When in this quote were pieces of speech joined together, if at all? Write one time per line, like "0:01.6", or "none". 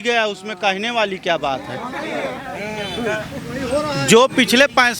none